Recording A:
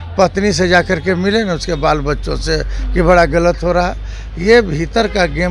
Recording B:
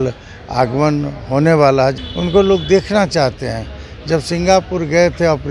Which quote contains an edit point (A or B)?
B